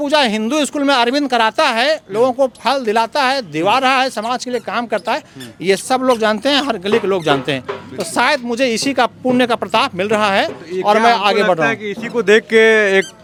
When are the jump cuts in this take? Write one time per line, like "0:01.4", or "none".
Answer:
none